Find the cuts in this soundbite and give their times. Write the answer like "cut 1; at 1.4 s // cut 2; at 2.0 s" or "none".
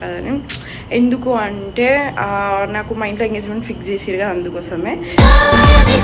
none